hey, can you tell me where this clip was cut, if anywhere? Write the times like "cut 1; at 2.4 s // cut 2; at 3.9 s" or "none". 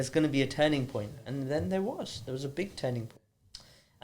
cut 1; at 3.1 s